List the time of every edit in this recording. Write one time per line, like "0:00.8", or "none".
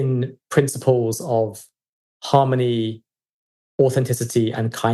none